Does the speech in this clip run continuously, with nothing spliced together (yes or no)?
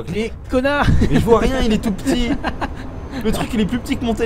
yes